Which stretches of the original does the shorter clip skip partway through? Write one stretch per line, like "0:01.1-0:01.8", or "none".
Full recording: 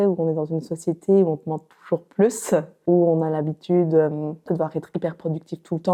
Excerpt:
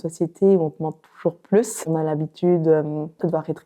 0:02.5-0:03.1